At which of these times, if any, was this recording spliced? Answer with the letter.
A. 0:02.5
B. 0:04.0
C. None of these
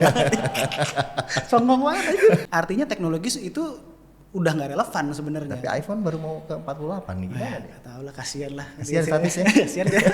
A